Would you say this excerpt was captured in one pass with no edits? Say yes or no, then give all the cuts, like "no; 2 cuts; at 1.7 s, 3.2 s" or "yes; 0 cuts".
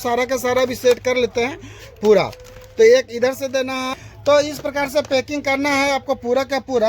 no; 1 cut; at 3.9 s